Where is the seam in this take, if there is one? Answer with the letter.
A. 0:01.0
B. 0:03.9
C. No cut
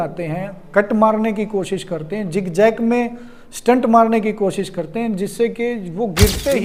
C